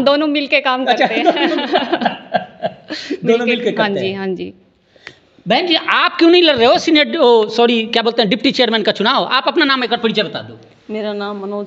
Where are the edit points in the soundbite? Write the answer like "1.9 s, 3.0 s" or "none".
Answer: none